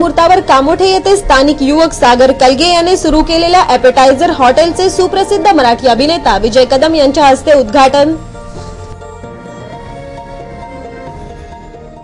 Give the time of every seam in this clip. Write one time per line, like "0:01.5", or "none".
none